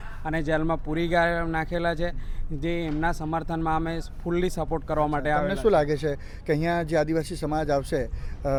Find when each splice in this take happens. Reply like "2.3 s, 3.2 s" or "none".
none